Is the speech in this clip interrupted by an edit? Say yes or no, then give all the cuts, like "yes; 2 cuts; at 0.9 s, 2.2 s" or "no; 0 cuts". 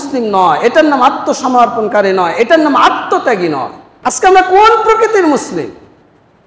yes; 1 cut; at 3.8 s